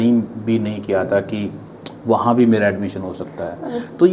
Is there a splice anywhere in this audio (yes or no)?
no